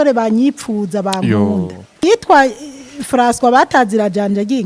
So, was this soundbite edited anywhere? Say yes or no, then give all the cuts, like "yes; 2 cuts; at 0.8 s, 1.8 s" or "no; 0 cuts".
yes; 1 cut; at 2.0 s